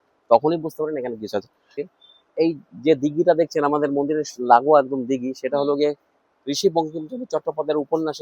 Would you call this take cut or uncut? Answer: cut